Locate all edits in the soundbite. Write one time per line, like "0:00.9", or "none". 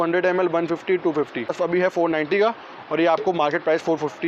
0:01.6